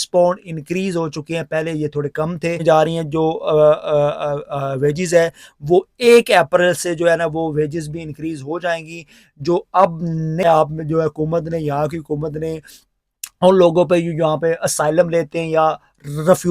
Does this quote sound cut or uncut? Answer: cut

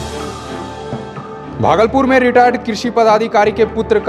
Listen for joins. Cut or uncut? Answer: uncut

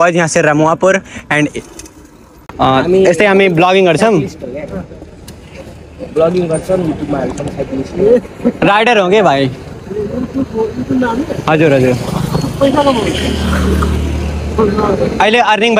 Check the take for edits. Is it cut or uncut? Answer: uncut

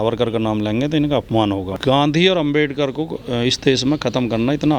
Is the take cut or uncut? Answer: cut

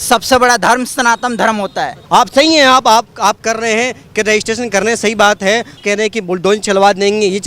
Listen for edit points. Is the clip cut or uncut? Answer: cut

